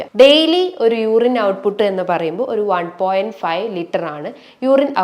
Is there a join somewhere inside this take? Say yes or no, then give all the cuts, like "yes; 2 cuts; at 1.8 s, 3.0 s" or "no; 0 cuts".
no; 0 cuts